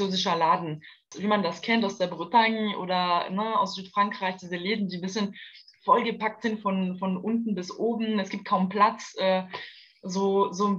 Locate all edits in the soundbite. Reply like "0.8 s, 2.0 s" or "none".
1.1 s